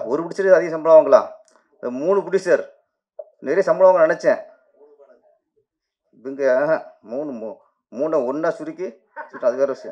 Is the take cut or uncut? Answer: uncut